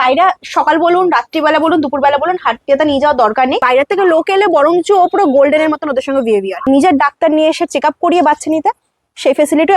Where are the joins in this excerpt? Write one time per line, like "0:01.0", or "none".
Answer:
0:03.6
0:06.6